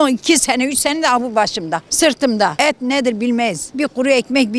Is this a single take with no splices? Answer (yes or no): no